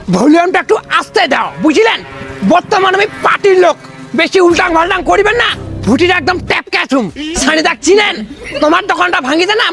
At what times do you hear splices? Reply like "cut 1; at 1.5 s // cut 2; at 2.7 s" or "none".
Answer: none